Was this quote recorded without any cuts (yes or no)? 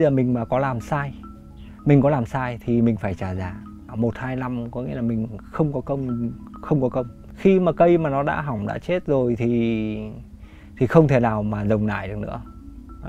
no